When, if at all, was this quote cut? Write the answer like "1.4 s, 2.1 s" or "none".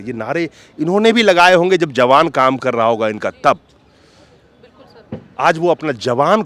none

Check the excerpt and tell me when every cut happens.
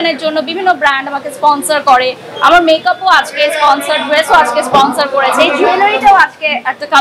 none

